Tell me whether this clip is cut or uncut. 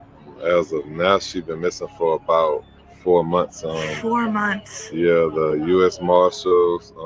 uncut